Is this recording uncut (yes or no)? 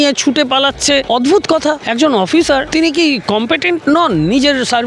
no